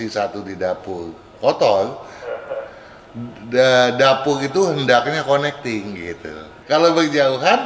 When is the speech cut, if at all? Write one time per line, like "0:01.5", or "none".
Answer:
0:06.5

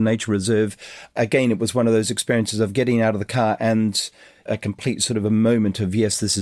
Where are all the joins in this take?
0:01.1
0:04.5

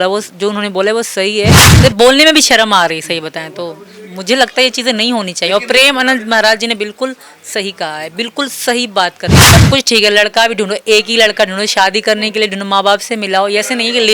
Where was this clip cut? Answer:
0:01.6
0:09.4

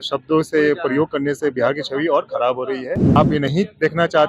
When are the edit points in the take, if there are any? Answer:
0:03.2

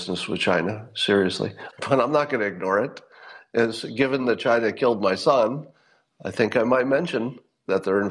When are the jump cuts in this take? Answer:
0:01.6

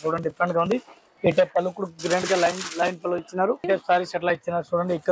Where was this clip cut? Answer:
0:03.6

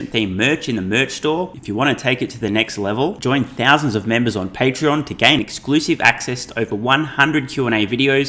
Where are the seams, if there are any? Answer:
none

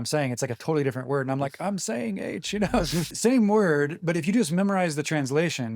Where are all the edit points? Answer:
0:03.1

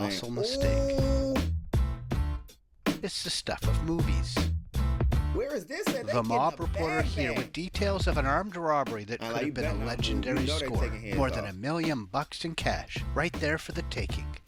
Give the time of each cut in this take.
none

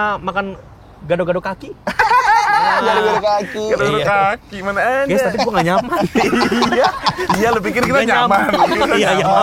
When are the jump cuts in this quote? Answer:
none

